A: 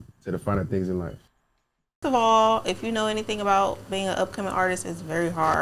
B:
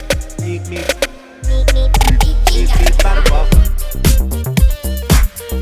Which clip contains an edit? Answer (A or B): A